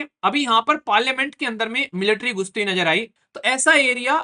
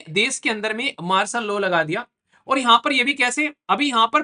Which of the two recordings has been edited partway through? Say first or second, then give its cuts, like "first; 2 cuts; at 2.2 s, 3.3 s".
first; 1 cut; at 3.1 s